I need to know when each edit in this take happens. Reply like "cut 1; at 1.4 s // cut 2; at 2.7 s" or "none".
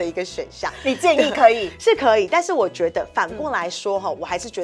none